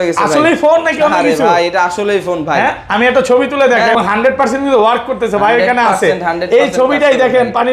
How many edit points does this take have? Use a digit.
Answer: 1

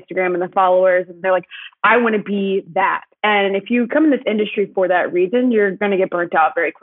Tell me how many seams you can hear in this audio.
3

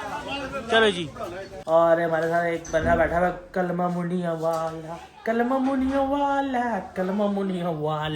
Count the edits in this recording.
1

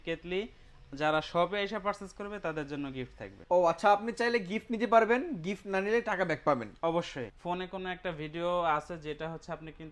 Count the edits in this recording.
2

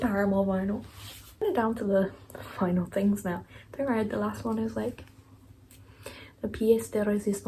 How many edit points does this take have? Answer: 1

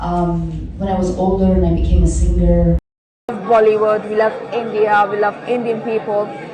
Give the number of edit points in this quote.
1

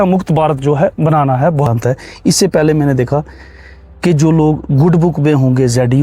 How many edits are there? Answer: 1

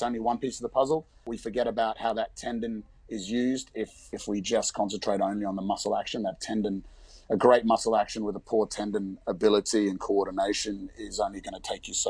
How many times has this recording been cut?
2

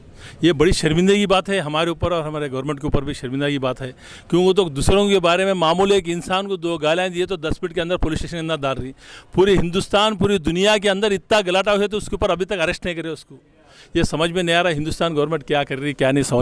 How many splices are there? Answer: 0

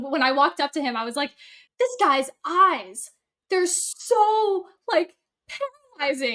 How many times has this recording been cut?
1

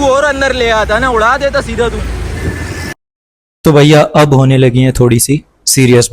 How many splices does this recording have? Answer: 1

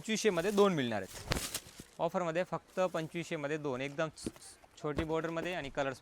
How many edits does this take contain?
0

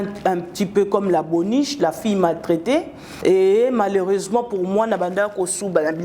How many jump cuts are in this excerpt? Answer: 1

